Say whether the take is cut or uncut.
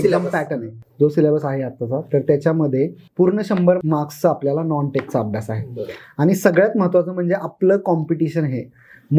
cut